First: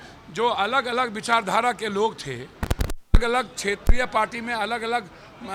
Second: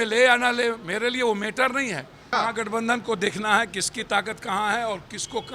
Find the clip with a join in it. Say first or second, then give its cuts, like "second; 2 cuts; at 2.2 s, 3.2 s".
second; 1 cut; at 2.3 s